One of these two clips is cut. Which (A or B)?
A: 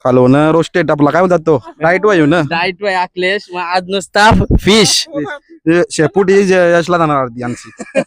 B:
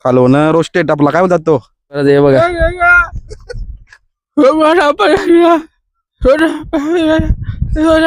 B